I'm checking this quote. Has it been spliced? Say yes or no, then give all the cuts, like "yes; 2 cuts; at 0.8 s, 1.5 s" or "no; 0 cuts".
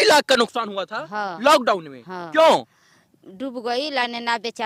no; 0 cuts